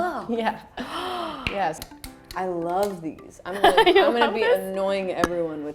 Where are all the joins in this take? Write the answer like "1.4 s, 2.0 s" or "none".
1.8 s